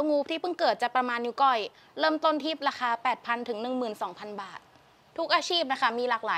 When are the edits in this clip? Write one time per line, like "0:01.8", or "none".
0:04.9